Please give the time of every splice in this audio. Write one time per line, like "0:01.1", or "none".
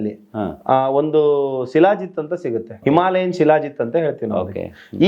0:02.8